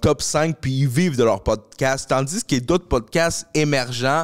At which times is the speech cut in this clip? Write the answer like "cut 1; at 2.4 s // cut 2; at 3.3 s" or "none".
none